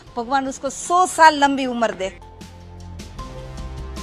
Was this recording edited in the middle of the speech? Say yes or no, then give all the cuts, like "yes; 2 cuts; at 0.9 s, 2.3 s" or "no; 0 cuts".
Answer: yes; 1 cut; at 2.1 s